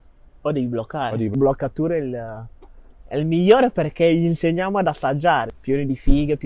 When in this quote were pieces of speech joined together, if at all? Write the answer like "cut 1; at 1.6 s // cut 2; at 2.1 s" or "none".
cut 1; at 1.3 s // cut 2; at 5.5 s